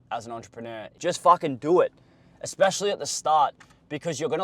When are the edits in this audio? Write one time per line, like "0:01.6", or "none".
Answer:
0:00.9